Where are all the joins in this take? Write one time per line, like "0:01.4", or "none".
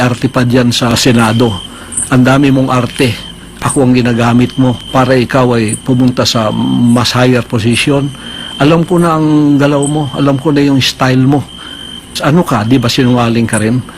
0:00.9
0:04.8
0:12.1